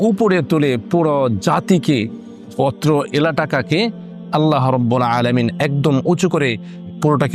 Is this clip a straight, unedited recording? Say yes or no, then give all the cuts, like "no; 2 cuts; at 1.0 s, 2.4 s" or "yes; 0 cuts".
yes; 0 cuts